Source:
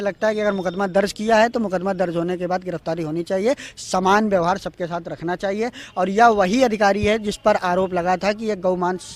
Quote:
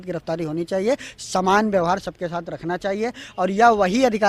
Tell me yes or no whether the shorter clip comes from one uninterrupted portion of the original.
yes